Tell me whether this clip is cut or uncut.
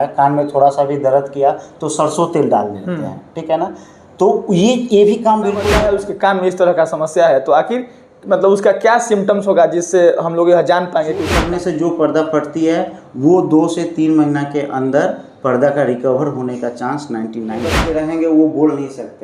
cut